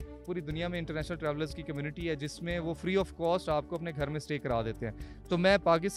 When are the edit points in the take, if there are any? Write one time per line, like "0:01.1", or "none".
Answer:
none